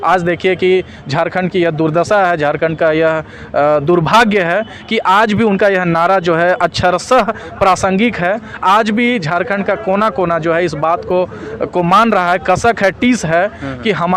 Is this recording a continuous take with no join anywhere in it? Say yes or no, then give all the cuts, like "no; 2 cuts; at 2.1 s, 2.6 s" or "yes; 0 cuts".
yes; 0 cuts